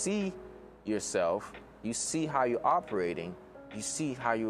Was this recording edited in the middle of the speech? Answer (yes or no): no